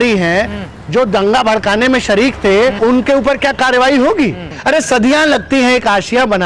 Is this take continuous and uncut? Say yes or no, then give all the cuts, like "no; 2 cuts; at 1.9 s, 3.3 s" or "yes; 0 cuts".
no; 1 cut; at 4.5 s